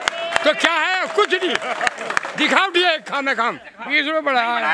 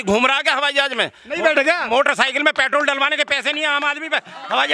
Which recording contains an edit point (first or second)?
first